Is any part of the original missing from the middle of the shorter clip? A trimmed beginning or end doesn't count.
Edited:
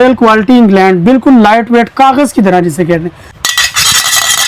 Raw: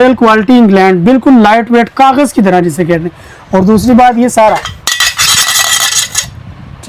yes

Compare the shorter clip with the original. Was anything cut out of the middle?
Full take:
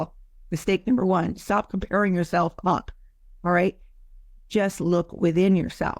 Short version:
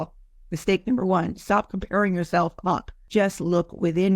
yes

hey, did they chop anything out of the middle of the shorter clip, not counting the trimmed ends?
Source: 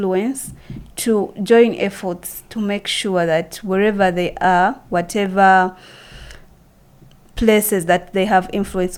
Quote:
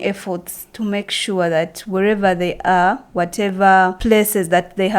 yes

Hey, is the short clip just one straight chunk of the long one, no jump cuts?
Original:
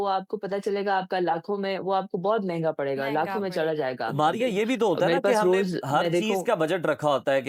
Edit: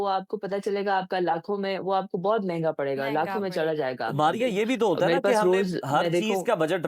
yes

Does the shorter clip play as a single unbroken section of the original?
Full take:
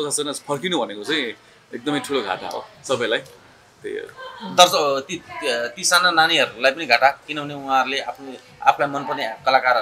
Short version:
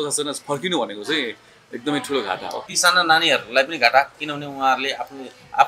no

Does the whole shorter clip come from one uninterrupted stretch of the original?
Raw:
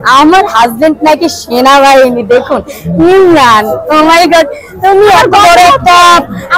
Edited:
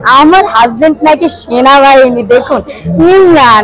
yes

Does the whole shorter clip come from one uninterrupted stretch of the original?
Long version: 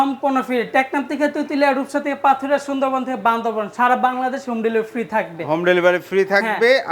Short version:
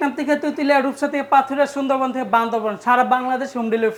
yes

